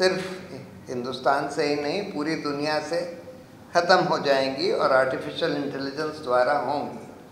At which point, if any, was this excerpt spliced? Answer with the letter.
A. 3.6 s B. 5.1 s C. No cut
C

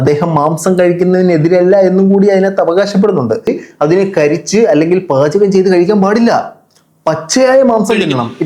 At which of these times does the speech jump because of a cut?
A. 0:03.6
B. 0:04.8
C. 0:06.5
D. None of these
A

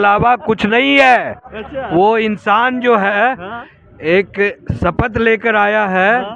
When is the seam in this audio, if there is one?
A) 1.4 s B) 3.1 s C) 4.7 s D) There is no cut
D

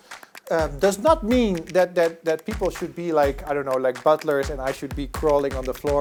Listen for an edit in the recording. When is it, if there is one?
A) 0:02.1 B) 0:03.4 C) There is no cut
C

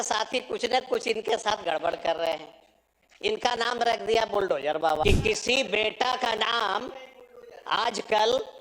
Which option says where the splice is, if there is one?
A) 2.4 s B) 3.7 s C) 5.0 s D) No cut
C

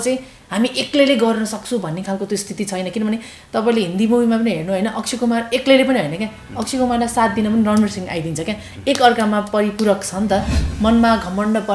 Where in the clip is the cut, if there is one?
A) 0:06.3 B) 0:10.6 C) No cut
B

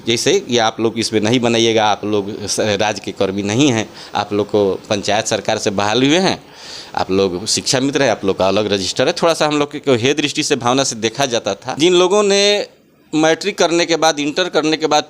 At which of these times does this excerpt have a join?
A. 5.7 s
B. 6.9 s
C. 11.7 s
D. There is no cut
C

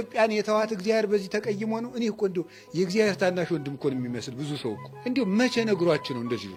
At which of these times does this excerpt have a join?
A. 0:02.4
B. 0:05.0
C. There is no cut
C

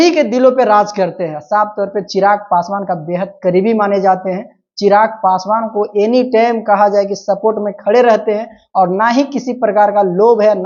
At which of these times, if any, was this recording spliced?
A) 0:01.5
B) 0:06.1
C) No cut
C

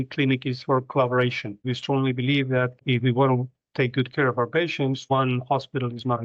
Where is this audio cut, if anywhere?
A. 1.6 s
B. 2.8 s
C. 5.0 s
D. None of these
A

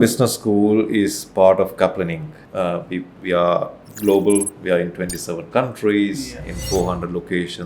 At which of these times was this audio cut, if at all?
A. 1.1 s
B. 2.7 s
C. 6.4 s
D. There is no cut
B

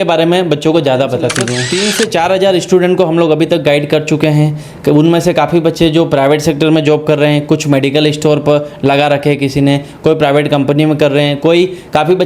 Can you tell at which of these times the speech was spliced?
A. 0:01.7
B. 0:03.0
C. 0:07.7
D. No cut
A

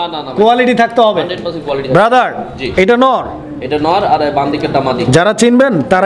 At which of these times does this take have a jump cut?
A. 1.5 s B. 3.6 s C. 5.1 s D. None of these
D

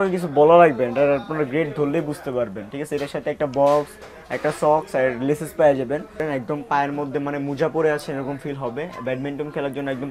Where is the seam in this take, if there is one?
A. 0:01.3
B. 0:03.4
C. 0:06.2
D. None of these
C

